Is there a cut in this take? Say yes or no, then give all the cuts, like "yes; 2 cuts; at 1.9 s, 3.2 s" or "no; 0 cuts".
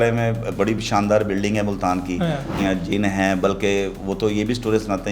yes; 1 cut; at 2.6 s